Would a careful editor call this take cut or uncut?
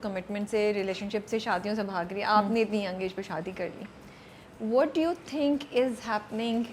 uncut